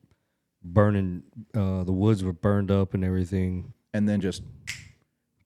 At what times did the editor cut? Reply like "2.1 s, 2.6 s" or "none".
3.7 s